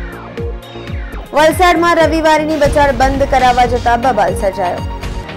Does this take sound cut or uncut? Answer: cut